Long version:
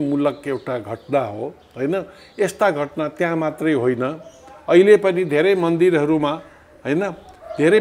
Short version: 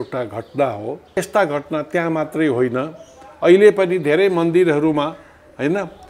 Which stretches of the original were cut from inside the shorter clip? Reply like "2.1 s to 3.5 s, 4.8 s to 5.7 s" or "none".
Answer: 1.7 s to 2.4 s